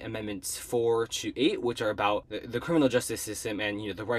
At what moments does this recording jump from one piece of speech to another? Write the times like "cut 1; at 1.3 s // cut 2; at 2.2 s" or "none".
cut 1; at 2.3 s